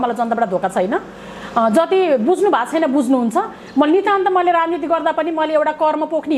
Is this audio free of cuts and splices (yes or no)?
yes